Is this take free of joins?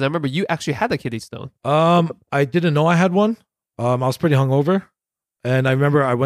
yes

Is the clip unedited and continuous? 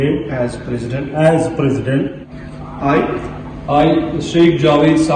no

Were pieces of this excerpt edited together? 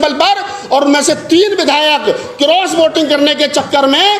no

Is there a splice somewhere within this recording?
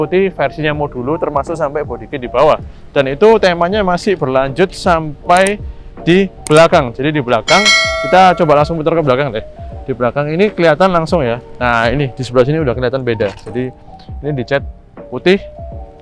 no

